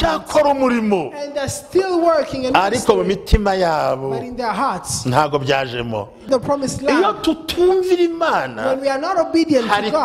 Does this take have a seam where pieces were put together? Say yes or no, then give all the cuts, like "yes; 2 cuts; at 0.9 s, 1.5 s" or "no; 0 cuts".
yes; 1 cut; at 6.3 s